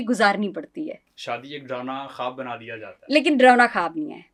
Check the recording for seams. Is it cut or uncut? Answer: uncut